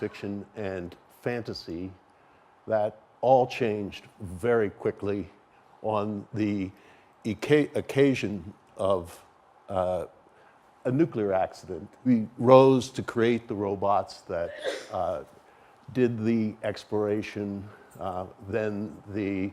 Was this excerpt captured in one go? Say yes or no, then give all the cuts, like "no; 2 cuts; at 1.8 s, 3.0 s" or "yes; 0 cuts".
no; 1 cut; at 11.9 s